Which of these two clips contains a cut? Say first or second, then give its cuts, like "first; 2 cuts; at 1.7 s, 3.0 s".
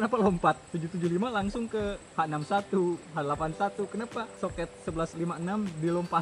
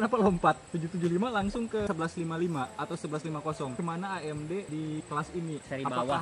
second; 2 cuts; at 1.9 s, 3.8 s